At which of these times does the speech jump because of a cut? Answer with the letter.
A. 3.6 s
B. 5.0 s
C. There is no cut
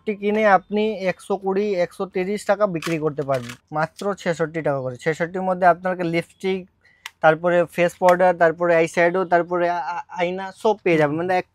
A